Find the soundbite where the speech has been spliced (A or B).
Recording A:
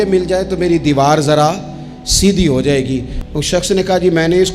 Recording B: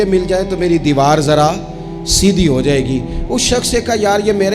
A